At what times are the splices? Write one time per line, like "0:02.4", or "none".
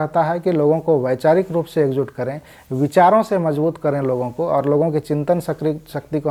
none